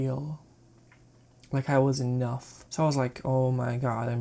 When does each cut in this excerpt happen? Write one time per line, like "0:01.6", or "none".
none